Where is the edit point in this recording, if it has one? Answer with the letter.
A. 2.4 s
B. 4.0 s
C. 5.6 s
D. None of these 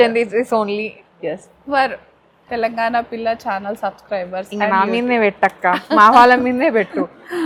D